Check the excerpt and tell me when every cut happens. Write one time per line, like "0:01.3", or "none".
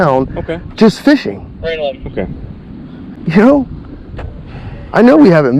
none